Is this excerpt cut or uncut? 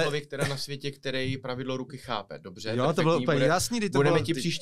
uncut